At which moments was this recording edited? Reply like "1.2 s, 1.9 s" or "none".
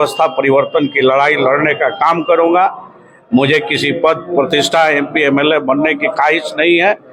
none